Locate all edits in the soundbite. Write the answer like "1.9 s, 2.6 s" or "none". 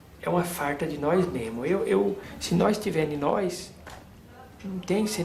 2.3 s

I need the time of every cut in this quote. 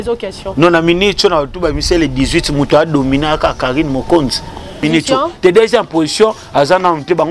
4.8 s

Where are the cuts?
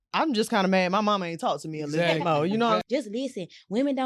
2.8 s

